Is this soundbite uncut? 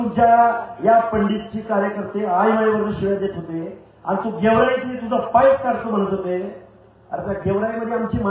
yes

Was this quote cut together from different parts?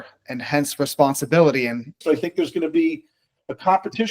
yes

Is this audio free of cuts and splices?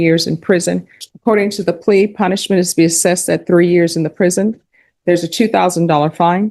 no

